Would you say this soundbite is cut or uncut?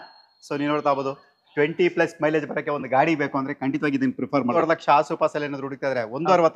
cut